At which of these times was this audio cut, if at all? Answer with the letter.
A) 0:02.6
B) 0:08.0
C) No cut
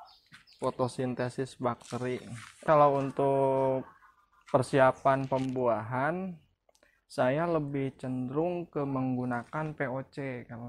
A